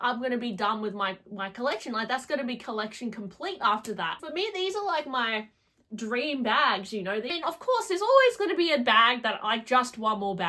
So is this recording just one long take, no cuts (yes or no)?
no